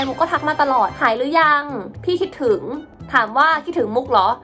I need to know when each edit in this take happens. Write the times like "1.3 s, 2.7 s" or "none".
0.9 s